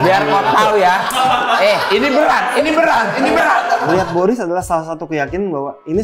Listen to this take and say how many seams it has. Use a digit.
1